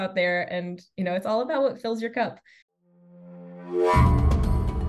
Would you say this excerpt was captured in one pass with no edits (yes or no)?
no